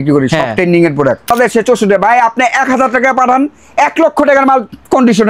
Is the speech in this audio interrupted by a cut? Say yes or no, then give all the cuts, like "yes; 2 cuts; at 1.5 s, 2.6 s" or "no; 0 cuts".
yes; 1 cut; at 1.3 s